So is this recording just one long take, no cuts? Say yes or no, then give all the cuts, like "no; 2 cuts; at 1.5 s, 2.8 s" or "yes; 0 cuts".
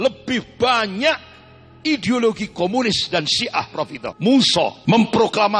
no; 2 cuts; at 4.0 s, 4.8 s